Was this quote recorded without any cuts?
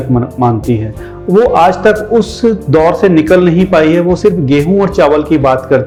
yes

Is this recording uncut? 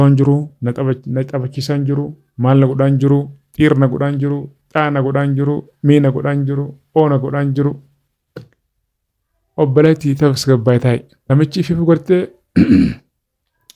no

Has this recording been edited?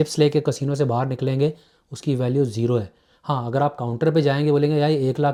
no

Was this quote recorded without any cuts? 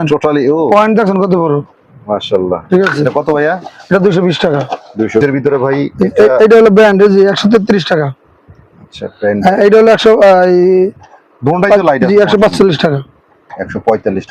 no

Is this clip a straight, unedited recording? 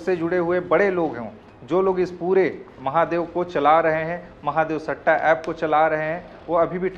yes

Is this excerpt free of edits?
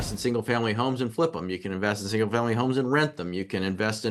yes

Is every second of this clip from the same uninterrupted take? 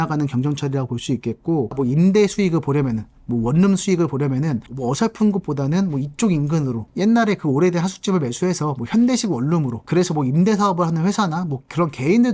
no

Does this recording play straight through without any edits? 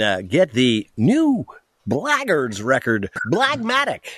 no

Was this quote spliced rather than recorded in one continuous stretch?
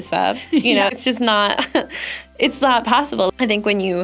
yes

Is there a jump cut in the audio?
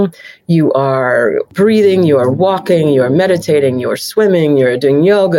yes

